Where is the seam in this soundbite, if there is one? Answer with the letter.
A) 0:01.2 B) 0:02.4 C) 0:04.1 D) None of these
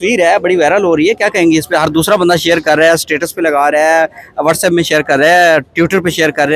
D